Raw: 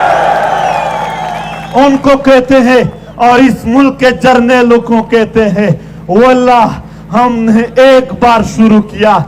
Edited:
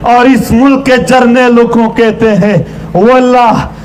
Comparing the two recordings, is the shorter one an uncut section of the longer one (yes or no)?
yes